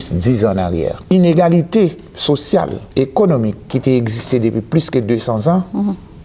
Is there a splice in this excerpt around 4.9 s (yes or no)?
no